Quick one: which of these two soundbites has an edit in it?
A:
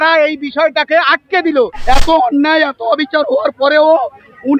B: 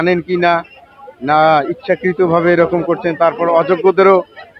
A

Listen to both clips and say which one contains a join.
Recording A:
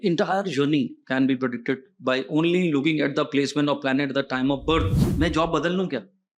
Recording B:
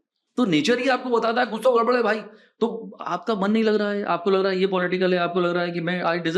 A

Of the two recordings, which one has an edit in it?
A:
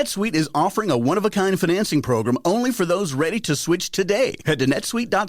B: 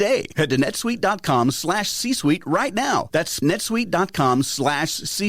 B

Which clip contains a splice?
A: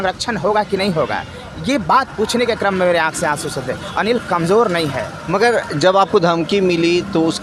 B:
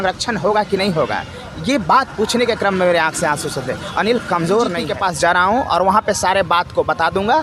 B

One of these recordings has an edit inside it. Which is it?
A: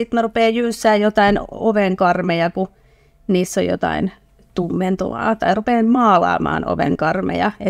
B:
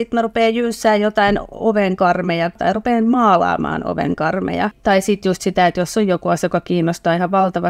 B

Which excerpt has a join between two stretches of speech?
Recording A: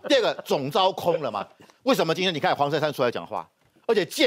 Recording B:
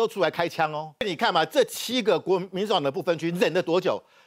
B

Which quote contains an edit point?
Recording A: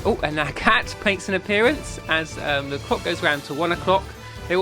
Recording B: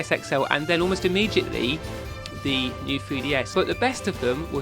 B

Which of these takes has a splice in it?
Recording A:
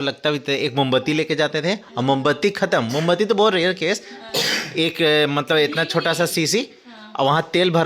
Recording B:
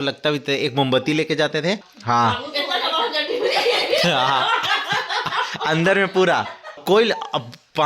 B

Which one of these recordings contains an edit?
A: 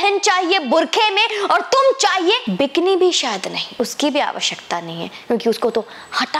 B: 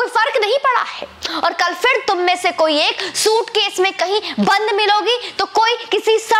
A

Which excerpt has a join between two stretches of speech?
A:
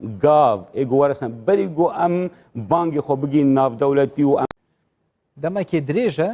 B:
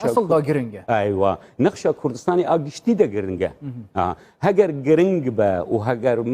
A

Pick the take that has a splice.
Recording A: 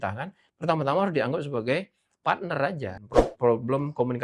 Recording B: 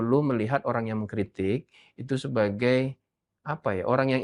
A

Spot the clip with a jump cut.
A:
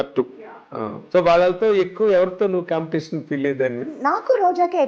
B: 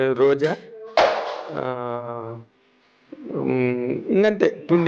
A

